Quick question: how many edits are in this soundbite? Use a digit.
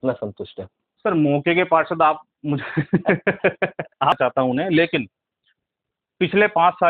1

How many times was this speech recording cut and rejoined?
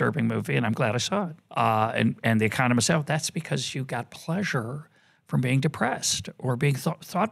1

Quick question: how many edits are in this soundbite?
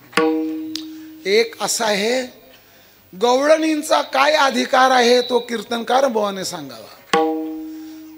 0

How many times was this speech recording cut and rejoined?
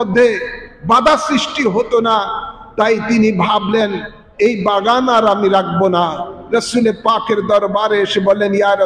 0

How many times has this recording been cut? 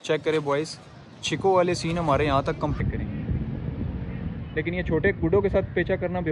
1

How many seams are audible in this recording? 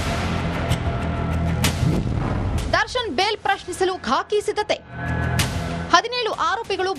1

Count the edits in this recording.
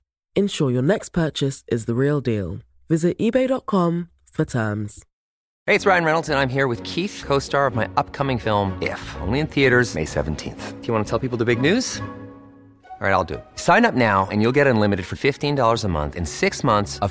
1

